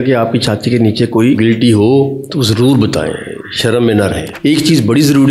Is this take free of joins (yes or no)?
no